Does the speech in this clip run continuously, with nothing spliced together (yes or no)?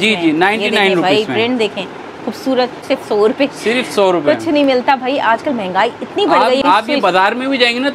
no